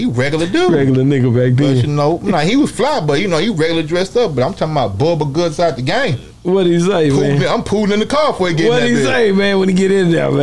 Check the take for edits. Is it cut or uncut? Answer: cut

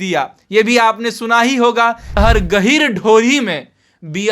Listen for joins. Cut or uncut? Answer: cut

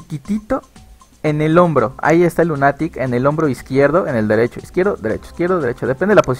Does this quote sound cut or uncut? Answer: cut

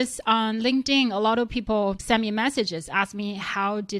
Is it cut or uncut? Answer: cut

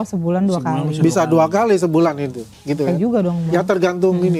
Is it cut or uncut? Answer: uncut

